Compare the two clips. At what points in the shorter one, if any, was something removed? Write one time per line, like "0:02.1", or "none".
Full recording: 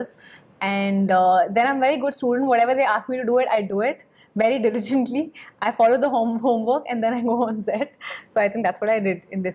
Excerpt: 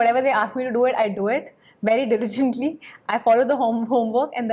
none